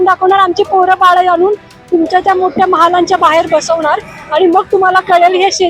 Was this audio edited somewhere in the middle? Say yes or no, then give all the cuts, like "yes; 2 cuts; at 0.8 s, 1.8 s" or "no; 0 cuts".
no; 0 cuts